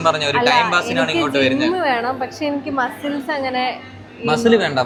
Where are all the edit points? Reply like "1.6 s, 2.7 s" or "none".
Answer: none